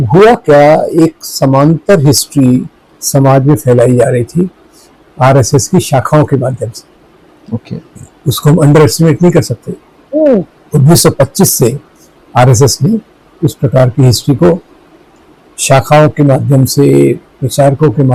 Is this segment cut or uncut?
uncut